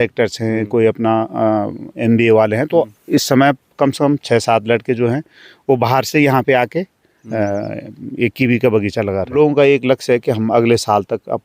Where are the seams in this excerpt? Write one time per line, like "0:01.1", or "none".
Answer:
0:09.3